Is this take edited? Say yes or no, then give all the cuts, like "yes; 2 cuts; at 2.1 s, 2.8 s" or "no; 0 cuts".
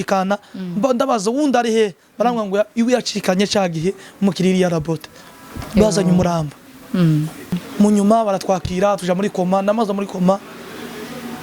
yes; 1 cut; at 7.6 s